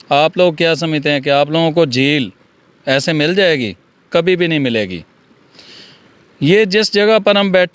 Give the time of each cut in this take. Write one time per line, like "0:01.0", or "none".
none